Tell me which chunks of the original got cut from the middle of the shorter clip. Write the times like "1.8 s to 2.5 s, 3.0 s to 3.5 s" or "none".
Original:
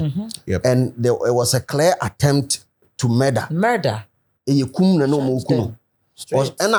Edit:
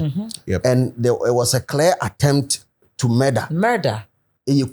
none